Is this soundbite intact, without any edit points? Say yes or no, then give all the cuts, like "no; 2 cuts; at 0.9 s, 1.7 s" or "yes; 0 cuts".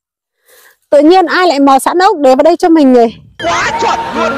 no; 1 cut; at 3.3 s